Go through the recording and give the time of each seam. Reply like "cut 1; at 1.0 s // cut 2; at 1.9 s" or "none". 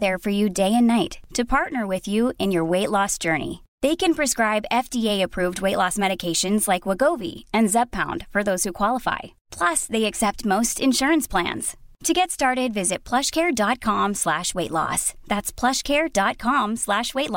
none